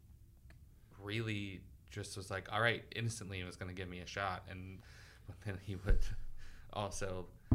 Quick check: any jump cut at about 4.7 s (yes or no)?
yes